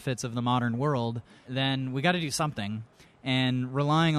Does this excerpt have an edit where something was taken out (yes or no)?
yes